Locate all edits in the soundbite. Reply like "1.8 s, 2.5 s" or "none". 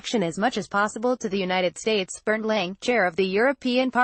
2.3 s

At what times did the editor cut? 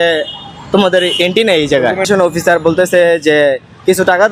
2.1 s

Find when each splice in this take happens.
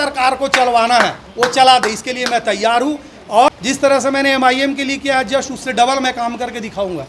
3.5 s

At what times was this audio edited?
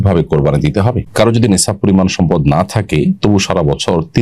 1.0 s

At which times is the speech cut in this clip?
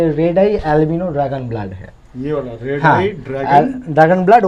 none

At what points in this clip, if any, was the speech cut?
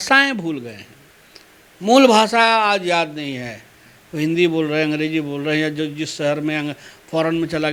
none

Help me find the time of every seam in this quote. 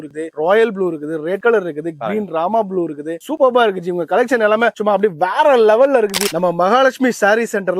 6.2 s

